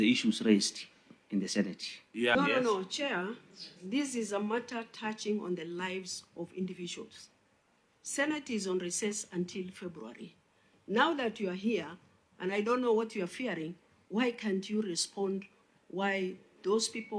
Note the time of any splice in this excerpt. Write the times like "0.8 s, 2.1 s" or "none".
none

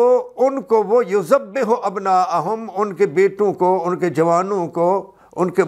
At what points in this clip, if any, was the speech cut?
none

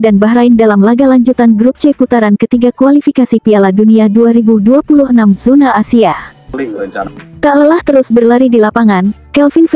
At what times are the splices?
6.6 s

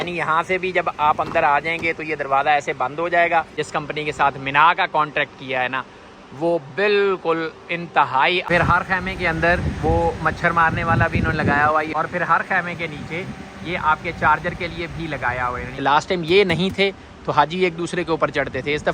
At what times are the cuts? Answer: 3.6 s, 8.4 s, 11.9 s, 15.8 s

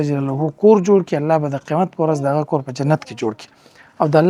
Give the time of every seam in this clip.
none

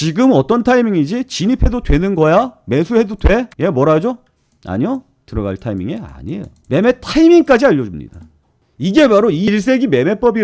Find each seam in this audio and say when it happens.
none

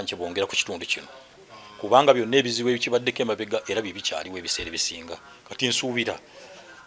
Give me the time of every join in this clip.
none

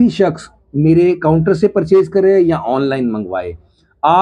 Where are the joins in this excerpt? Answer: none

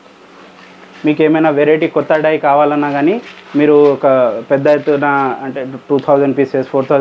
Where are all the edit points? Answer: none

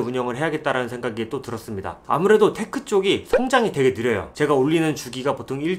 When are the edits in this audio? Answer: 4.3 s

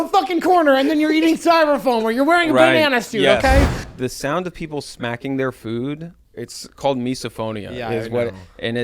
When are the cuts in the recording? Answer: 3.8 s, 6.2 s

